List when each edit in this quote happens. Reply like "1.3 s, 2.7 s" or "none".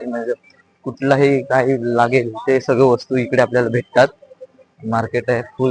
none